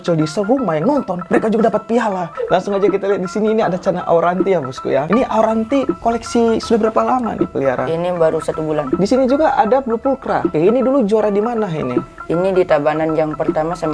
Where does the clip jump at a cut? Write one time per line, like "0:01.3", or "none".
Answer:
0:02.3
0:08.9
0:10.5